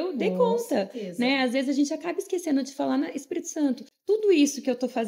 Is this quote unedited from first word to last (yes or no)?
no